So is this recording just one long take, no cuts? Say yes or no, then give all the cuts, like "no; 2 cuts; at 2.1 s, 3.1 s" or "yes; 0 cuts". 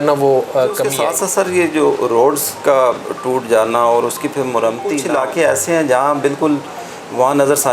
no; 2 cuts; at 0.9 s, 5.0 s